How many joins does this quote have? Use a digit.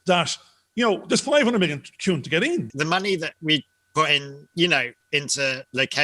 1